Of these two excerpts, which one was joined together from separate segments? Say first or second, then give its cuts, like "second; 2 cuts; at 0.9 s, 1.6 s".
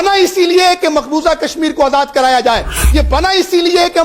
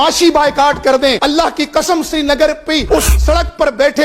second; 2 cuts; at 1.2 s, 2.8 s